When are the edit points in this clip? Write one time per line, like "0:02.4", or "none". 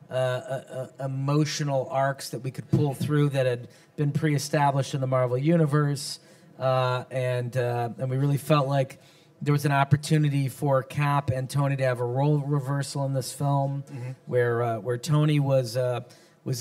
0:02.2

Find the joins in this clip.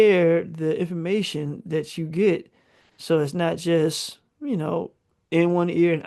none

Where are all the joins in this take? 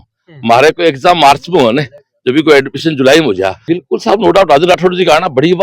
0:03.6

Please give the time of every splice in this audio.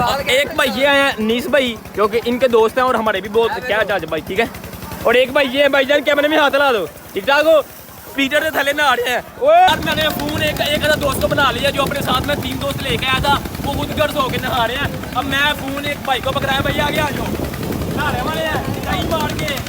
0:09.7

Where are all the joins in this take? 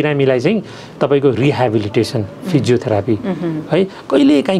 none

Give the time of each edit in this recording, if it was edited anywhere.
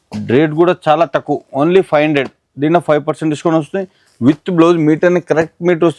none

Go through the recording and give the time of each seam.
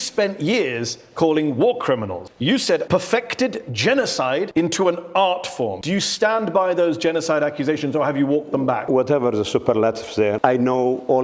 0:02.6
0:04.5
0:05.8
0:08.8
0:10.4

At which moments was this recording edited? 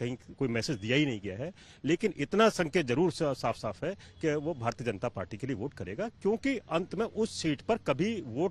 none

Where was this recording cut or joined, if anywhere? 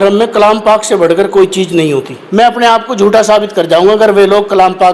0:02.2

